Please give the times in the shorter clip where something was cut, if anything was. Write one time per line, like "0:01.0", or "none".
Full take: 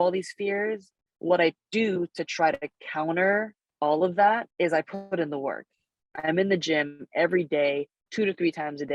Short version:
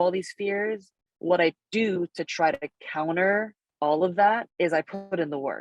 none